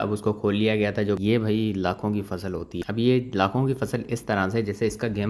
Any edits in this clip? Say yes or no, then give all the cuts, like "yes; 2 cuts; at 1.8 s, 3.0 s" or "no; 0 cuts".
yes; 2 cuts; at 1.2 s, 2.8 s